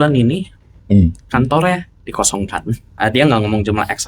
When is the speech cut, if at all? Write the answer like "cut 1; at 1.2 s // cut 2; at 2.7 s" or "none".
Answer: cut 1; at 2.9 s